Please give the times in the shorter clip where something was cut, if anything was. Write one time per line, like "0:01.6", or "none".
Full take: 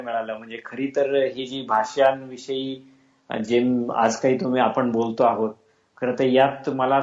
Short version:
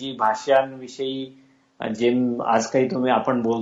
none